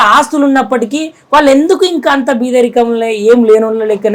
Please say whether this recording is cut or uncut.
uncut